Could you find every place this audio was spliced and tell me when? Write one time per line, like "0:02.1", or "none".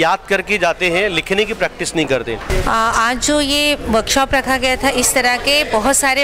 0:02.5